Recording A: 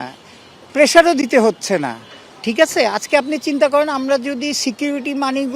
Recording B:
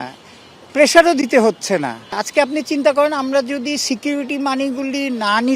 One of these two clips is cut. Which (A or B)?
B